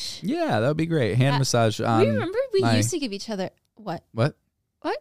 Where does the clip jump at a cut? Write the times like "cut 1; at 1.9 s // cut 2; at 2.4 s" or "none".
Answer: cut 1; at 3.7 s